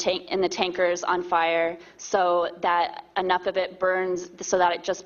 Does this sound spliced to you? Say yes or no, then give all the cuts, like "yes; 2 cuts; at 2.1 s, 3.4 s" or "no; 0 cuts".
yes; 1 cut; at 1.6 s